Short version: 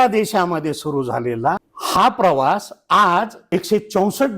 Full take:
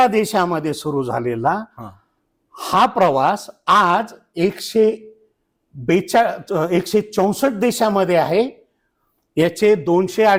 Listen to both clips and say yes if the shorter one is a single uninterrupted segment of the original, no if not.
no